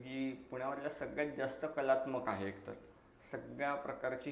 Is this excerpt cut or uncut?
uncut